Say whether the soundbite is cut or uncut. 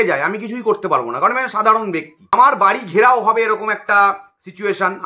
cut